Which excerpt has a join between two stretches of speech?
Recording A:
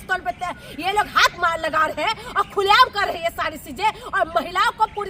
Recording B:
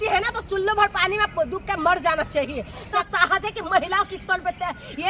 B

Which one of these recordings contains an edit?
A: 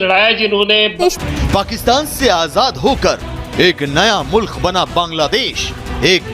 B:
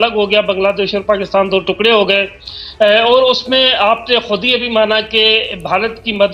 A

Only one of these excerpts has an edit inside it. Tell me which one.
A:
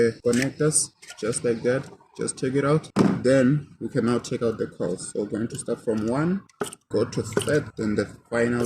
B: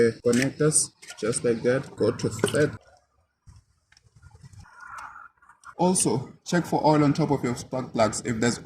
B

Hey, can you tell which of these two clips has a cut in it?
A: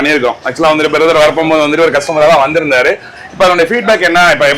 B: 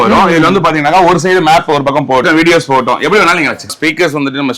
B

